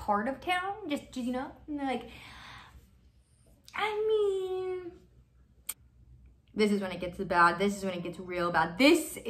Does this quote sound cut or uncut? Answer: cut